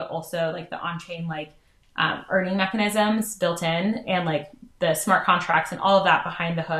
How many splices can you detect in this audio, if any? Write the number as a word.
zero